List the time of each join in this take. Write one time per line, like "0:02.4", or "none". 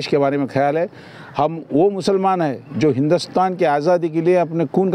none